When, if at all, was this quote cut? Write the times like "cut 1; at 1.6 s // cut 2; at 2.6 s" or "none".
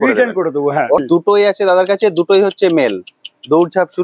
cut 1; at 1.0 s